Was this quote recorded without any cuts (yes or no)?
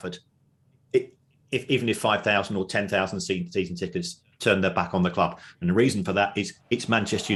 yes